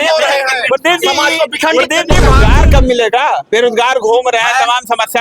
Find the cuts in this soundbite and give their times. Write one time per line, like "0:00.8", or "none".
0:02.4